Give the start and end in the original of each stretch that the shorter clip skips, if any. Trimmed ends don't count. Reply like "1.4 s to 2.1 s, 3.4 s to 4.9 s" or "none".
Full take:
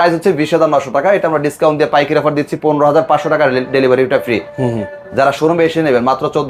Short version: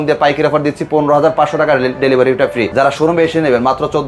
4.4 s to 5.1 s